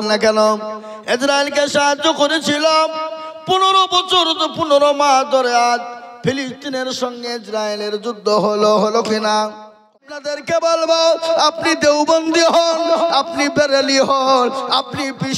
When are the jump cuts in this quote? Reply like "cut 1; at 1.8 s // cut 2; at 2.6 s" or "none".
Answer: cut 1; at 9.9 s

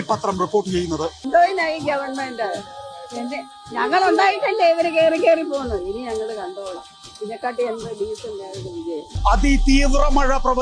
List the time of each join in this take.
cut 1; at 1.2 s // cut 2; at 9.1 s

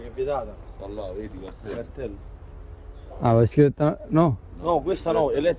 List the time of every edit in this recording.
none

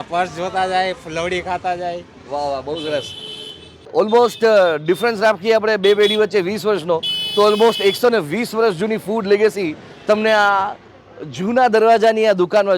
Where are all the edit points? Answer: cut 1; at 3.8 s

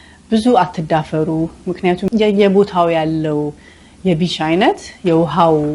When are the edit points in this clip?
cut 1; at 2.0 s

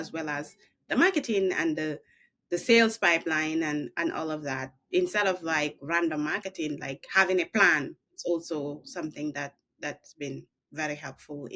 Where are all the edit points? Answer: cut 1; at 8.0 s

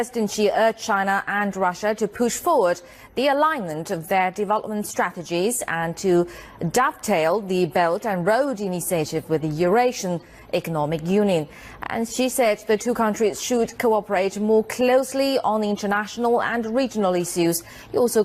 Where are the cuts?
none

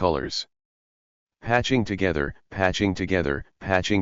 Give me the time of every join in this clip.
none

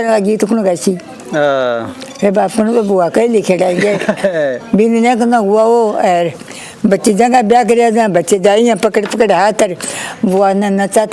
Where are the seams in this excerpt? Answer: none

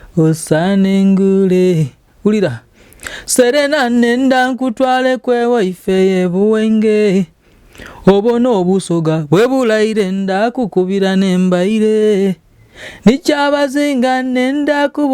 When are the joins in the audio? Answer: none

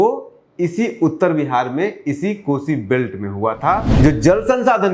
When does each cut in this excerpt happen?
cut 1; at 3.9 s

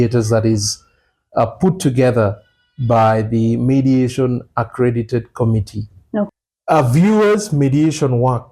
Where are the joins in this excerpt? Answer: cut 1; at 6.3 s

